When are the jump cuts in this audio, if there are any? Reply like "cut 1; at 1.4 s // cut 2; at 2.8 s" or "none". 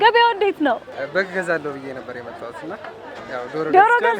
cut 1; at 0.9 s